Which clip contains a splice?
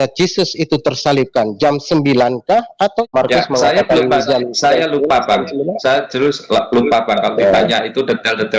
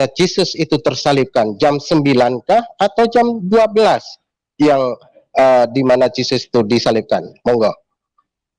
first; 1 cut; at 3.1 s

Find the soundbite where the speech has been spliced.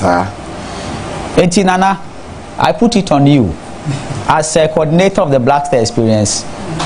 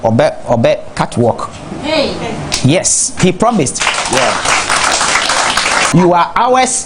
second; 1 cut; at 5.9 s

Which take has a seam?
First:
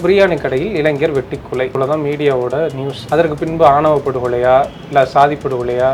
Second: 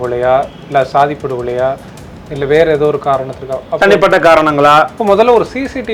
first; 2 cuts; at 1.7 s, 2.9 s

